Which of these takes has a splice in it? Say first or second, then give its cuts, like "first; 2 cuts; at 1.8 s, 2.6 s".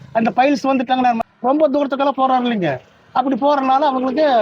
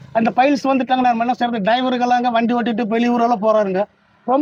first; 1 cut; at 0.9 s